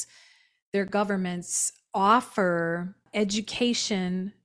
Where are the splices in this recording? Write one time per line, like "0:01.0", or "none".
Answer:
0:03.0